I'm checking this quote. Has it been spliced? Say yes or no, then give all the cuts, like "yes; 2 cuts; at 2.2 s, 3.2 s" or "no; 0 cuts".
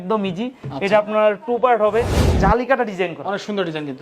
yes; 1 cut; at 2.3 s